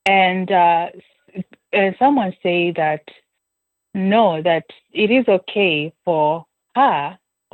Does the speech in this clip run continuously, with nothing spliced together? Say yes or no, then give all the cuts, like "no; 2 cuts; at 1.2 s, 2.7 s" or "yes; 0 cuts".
yes; 0 cuts